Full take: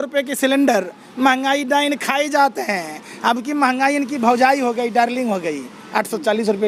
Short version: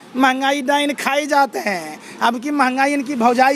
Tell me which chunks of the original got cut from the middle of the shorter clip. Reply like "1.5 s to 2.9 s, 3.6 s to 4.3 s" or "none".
none